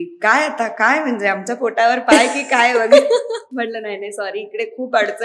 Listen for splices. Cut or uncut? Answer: uncut